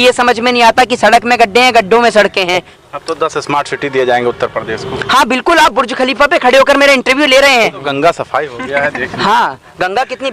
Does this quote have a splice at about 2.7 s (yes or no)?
yes